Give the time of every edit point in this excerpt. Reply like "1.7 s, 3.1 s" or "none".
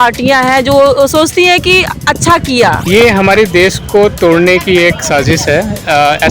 2.9 s